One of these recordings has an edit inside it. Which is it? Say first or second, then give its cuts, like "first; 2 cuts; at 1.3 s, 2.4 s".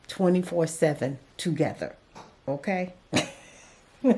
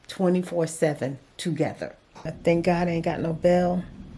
second; 1 cut; at 2.3 s